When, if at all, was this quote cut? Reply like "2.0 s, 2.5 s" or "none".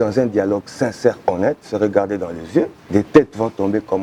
2.8 s